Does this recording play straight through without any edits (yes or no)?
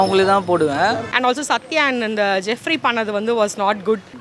no